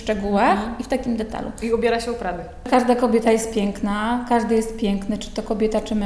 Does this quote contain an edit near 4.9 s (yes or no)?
no